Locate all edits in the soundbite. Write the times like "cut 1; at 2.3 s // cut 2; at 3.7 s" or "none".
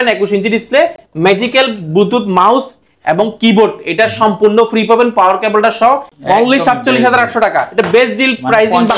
cut 1; at 6.1 s